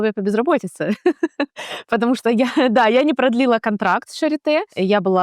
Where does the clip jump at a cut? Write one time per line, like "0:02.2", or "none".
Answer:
none